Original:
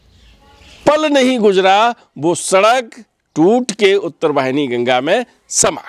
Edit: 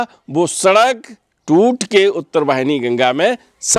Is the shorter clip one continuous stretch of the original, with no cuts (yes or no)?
yes